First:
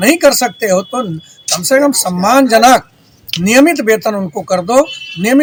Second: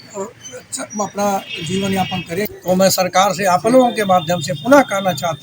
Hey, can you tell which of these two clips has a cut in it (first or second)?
second